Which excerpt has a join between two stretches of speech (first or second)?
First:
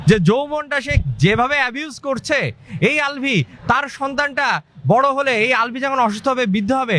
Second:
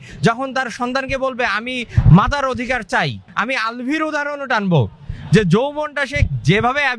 second